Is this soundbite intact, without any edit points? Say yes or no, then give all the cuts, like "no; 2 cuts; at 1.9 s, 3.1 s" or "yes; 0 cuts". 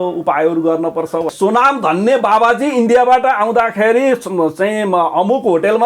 no; 1 cut; at 1.3 s